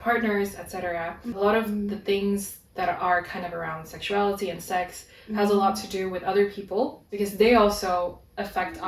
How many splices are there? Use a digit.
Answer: 2